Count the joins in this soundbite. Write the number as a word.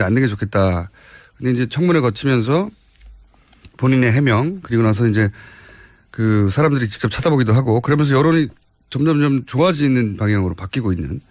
zero